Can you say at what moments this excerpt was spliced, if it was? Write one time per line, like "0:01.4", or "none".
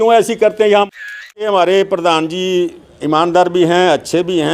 0:01.3